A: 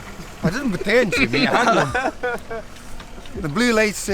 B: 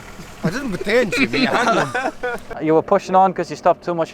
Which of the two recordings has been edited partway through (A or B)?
B